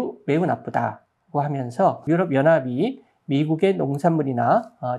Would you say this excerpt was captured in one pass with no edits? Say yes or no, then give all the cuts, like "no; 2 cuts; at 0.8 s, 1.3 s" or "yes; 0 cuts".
no; 1 cut; at 2.0 s